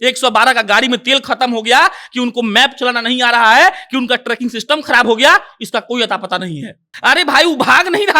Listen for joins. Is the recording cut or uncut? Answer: cut